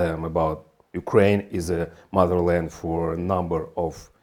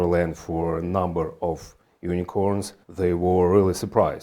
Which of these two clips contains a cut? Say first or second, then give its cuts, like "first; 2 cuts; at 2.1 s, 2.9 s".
second; 1 cut; at 2.8 s